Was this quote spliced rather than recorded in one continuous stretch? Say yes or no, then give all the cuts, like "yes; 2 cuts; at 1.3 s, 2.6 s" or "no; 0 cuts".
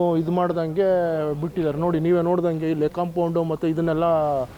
no; 0 cuts